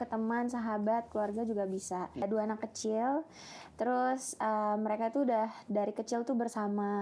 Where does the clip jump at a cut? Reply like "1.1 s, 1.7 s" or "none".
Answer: 2.2 s

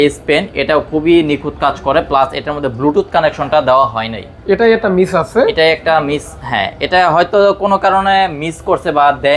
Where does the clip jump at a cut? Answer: none

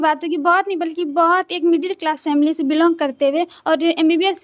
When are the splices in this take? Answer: none

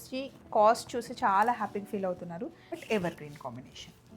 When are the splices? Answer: 2.8 s

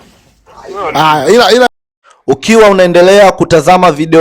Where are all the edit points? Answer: 1.8 s

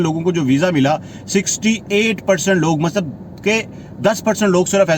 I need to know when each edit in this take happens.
none

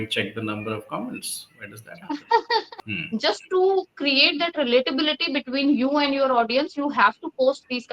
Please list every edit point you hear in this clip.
2.8 s

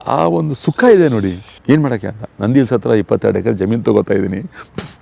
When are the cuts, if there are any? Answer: 1.5 s

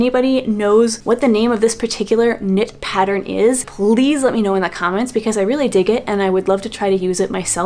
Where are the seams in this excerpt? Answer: none

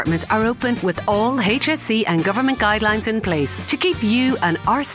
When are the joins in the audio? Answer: none

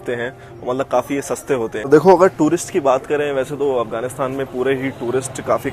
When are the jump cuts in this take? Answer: 1.8 s

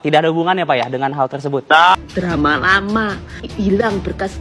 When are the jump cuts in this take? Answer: 2.1 s

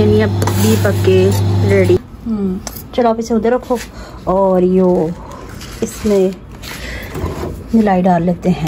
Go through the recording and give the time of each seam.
2.0 s

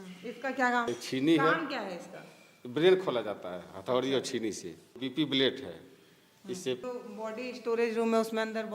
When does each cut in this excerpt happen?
0.9 s, 5.0 s, 6.8 s

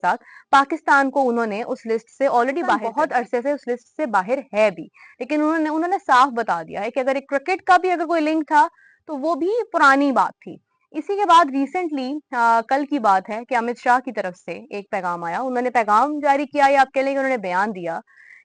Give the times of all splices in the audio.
2.9 s

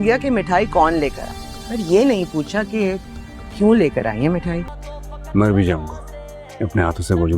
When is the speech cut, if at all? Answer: 5.0 s

